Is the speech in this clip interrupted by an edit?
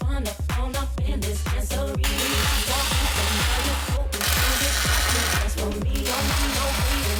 no; 0 cuts

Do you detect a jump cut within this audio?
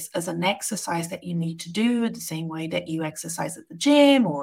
no; 0 cuts

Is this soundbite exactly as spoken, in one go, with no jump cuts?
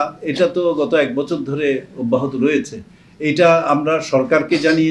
yes; 0 cuts

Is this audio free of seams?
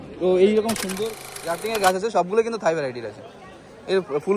no; 1 cut; at 1.0 s

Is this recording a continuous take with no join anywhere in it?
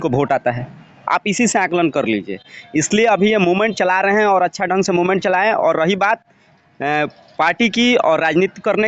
yes; 0 cuts

